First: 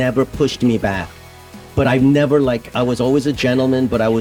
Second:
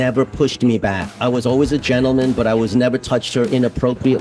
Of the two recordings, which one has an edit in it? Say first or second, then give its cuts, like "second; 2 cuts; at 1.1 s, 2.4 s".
second; 1 cut; at 1.1 s